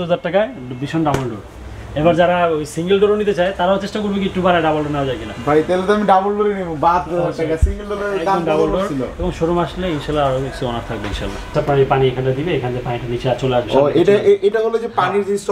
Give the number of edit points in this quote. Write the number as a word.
one